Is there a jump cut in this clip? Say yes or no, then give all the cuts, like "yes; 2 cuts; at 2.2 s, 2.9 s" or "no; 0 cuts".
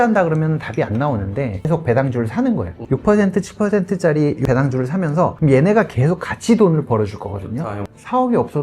yes; 3 cuts; at 2.8 s, 4.7 s, 7.6 s